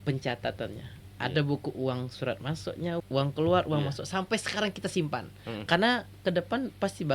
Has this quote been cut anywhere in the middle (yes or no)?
yes